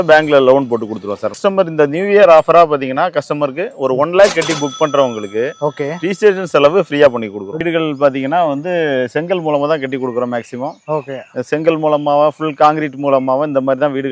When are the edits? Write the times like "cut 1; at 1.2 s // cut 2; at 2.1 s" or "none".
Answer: cut 1; at 1.4 s // cut 2; at 7.6 s